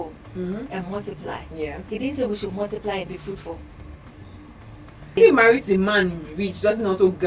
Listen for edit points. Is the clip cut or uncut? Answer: cut